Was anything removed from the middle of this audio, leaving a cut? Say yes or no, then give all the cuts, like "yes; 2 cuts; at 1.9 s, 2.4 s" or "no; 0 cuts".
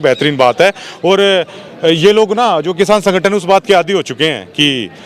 no; 0 cuts